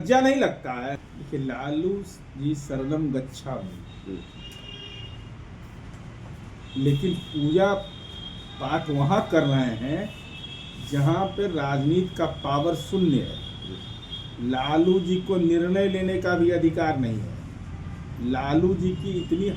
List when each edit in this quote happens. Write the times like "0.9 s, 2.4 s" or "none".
1.0 s